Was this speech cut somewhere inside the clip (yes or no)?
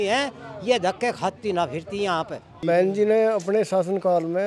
yes